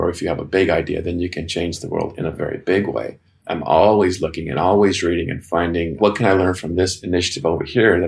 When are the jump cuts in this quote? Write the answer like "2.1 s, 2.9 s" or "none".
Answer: none